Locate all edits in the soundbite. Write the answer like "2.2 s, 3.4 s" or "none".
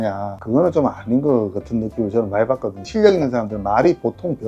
2.8 s